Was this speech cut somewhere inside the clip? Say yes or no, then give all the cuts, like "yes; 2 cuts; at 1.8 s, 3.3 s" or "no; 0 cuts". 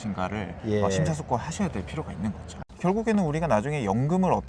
yes; 1 cut; at 2.5 s